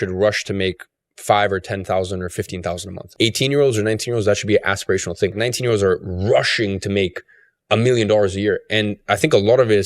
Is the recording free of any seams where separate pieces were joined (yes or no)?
no